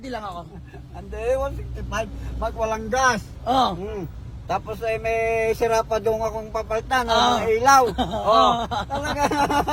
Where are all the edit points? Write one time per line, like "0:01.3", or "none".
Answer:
none